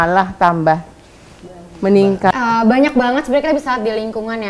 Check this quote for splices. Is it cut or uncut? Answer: cut